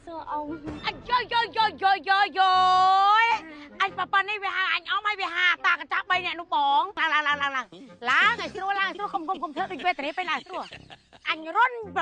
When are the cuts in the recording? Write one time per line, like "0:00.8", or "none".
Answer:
0:07.0